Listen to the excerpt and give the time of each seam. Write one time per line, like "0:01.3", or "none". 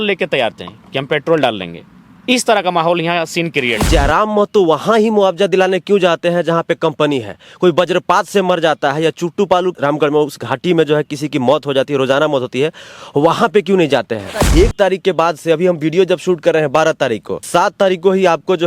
0:03.8
0:09.8
0:14.5
0:17.4